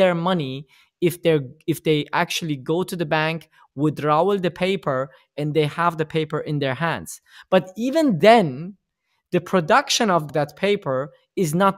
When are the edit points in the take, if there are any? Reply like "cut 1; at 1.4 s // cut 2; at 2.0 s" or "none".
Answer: cut 1; at 10.3 s